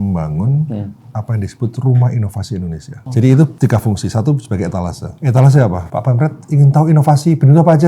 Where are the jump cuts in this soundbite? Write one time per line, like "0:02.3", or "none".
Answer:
0:02.9
0:03.5
0:05.1
0:05.8